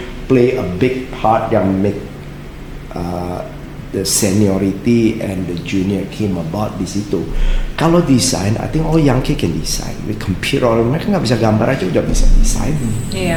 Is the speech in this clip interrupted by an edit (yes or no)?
no